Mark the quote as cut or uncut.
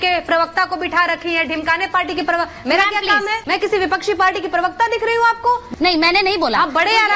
cut